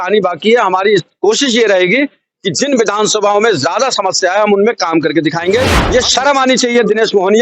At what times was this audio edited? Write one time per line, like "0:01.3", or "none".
0:05.8